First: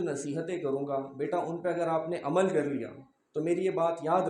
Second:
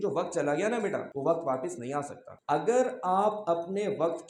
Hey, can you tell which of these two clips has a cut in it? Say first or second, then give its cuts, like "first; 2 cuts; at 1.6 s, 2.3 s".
second; 2 cuts; at 1.1 s, 2.4 s